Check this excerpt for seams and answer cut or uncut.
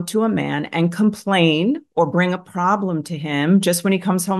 uncut